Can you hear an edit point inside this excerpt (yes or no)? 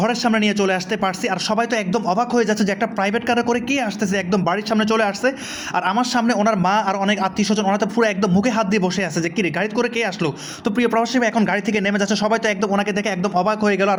no